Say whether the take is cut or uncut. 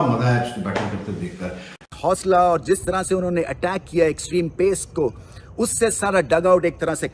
cut